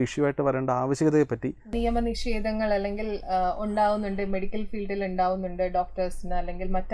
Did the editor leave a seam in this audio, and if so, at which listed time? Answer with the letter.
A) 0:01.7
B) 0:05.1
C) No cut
A